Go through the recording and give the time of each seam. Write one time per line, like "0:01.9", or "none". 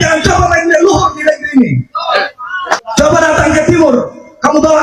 0:02.8